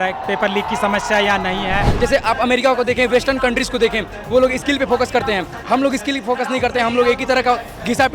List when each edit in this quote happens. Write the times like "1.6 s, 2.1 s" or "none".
1.9 s